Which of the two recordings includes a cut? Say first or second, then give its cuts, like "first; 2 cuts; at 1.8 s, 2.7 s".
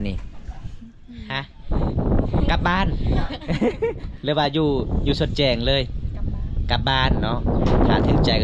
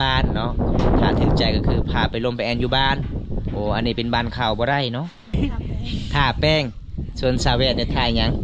second; 1 cut; at 5.3 s